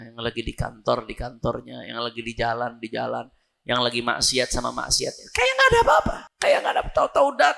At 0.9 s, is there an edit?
no; 1 cut; at 6.2 s

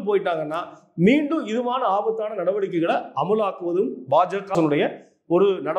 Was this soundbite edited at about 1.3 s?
no; 1 cut; at 4.5 s

